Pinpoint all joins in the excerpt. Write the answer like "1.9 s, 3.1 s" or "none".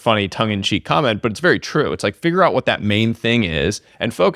none